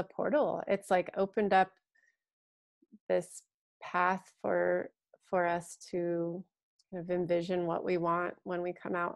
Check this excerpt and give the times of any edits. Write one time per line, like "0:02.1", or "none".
none